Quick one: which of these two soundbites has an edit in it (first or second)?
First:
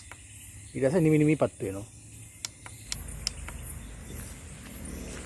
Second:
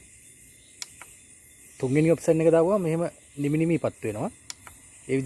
first